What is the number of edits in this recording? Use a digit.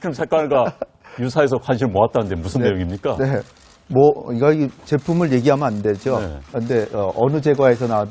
1